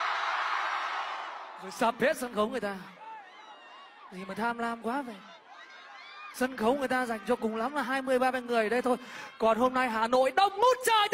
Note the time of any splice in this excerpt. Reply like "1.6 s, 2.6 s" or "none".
1.5 s